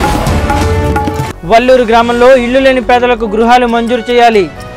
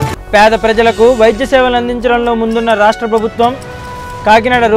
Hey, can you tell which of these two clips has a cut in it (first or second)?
first